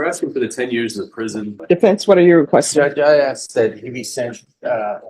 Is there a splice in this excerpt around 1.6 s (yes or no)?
yes